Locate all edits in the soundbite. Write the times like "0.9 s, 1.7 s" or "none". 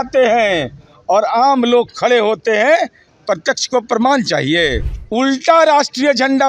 4.9 s